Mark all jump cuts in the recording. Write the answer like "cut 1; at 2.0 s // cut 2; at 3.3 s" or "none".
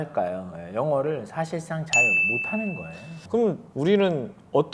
cut 1; at 3.7 s

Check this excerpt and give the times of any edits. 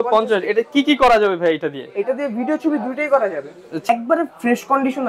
cut 1; at 3.9 s

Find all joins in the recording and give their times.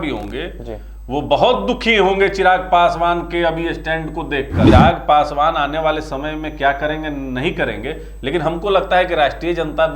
cut 1; at 4.7 s

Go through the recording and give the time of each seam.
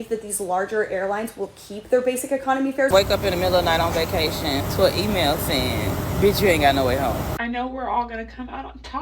cut 1; at 2.9 s // cut 2; at 4.6 s // cut 3; at 6.0 s // cut 4; at 7.3 s

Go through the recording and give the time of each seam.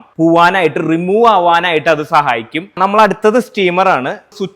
none

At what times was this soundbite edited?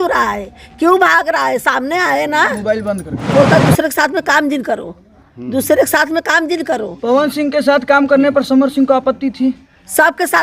cut 1; at 3.3 s

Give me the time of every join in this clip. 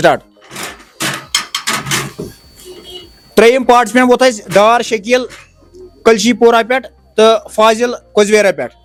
none

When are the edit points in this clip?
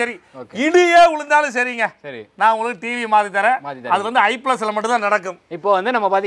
none

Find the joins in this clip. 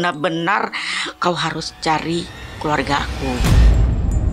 cut 1; at 3.4 s

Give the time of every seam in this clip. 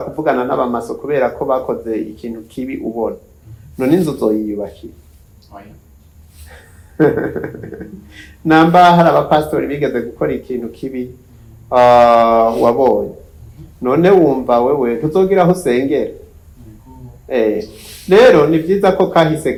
none

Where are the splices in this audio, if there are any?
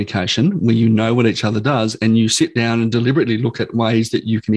none

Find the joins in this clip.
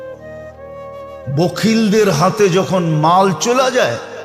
cut 1; at 1.2 s

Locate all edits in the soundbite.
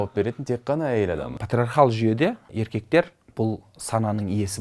cut 1; at 1.3 s // cut 2; at 2.5 s

